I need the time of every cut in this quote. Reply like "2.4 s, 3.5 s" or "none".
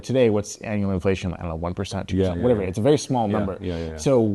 none